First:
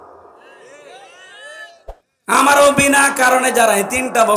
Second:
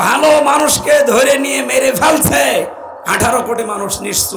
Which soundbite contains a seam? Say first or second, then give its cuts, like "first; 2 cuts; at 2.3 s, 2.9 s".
first; 1 cut; at 2.1 s